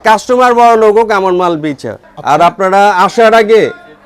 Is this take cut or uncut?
uncut